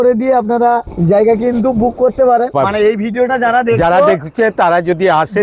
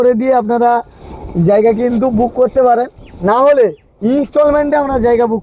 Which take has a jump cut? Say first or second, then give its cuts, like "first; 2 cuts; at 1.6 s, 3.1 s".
first; 2 cuts; at 0.9 s, 2.5 s